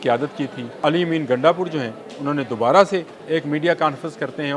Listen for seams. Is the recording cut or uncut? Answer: cut